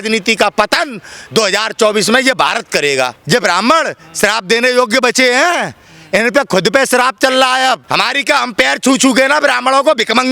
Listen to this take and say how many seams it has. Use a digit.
2